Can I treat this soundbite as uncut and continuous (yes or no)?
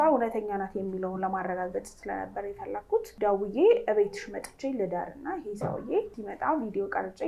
no